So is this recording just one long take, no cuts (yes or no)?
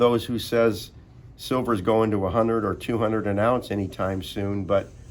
yes